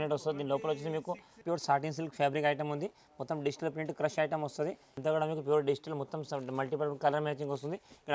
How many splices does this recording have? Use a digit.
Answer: 2